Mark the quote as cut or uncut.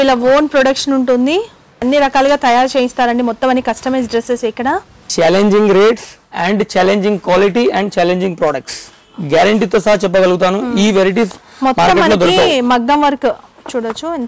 cut